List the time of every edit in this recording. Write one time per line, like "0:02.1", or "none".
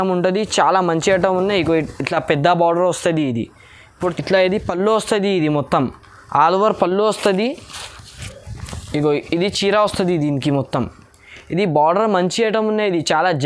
0:04.0

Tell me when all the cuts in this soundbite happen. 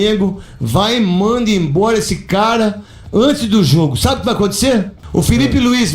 0:05.0

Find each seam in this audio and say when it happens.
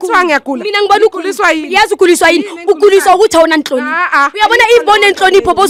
none

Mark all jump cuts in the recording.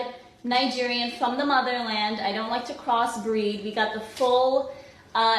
0:02.4

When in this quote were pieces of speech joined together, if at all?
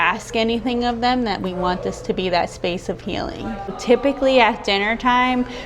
0:03.8

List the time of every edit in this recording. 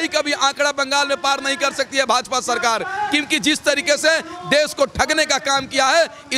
none

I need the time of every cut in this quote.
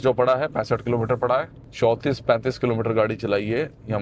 0:01.6

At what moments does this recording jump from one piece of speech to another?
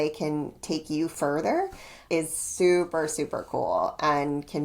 0:01.9

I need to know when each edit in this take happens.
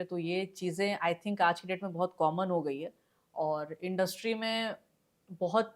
none

